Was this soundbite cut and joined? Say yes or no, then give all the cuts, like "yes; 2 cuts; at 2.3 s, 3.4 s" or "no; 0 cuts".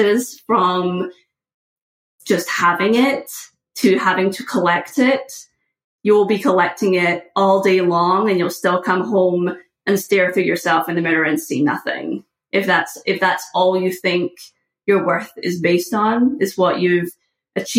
no; 0 cuts